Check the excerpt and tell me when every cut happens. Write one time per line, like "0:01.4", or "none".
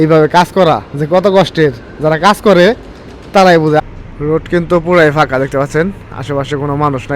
0:03.8